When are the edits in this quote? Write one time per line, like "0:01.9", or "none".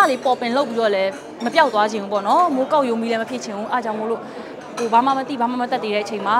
none